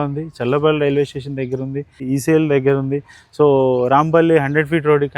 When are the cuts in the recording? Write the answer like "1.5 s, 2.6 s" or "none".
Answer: 2.0 s